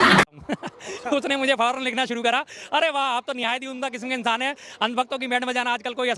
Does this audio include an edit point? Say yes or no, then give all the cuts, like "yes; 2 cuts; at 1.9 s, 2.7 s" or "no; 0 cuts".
no; 0 cuts